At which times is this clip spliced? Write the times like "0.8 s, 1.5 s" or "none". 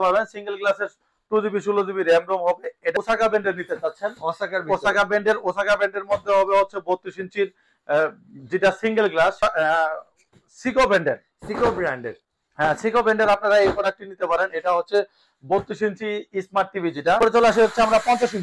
2.9 s, 9.4 s, 17.2 s